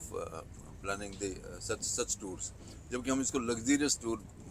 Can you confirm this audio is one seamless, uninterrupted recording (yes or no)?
yes